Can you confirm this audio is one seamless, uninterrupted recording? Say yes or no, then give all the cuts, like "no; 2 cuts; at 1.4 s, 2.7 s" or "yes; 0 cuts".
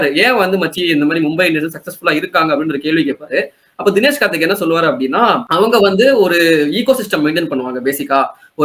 yes; 0 cuts